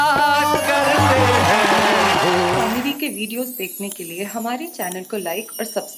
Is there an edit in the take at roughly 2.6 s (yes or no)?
yes